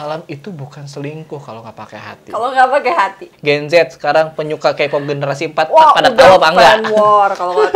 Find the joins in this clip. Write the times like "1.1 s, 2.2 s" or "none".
3.3 s